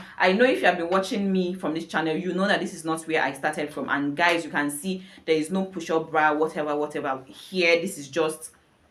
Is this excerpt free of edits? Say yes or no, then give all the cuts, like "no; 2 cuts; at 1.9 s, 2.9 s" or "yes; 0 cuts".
yes; 0 cuts